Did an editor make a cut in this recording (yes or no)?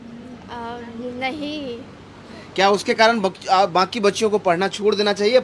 no